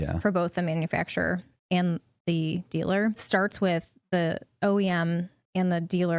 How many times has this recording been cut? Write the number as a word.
one